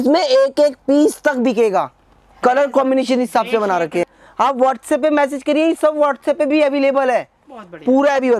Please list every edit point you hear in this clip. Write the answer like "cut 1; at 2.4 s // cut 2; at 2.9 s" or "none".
cut 1; at 4.2 s